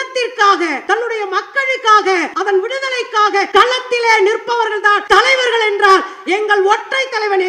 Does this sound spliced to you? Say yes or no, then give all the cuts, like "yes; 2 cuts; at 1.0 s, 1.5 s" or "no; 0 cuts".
yes; 4 cuts; at 0.8 s, 2.3 s, 3.5 s, 5.0 s